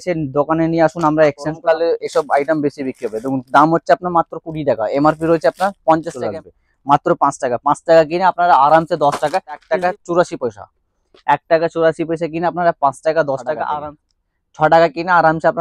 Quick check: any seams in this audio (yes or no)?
yes